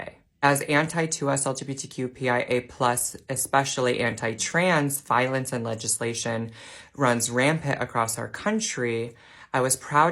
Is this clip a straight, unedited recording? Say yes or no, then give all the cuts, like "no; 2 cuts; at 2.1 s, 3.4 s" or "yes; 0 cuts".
no; 1 cut; at 9.2 s